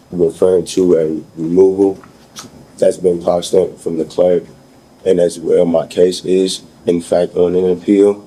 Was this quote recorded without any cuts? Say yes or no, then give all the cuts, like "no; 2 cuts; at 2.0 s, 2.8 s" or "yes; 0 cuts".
yes; 0 cuts